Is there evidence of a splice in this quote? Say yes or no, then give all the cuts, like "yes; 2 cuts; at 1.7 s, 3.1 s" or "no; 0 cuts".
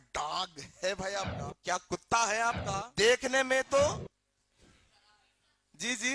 yes; 3 cuts; at 1.4 s, 2.6 s, 3.9 s